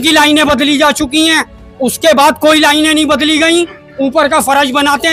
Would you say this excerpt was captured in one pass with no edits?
yes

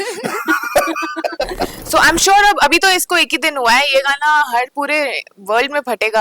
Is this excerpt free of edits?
no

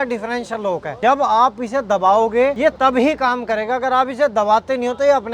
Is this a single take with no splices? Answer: no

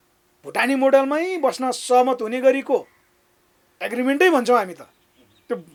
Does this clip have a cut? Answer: no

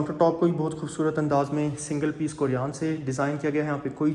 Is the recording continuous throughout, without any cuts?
yes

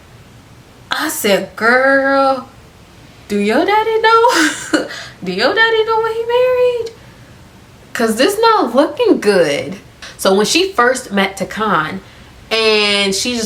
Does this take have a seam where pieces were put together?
no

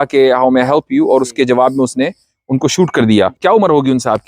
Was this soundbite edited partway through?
yes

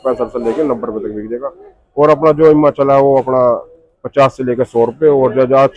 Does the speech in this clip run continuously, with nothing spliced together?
yes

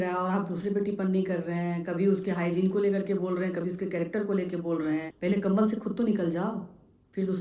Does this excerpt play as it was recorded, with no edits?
no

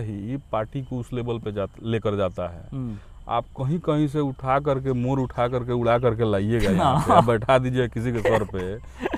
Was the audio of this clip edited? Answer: no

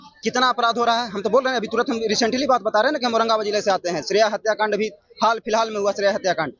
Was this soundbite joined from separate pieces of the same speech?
no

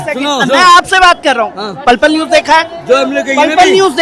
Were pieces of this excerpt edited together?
no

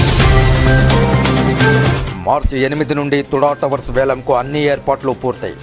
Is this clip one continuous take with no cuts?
no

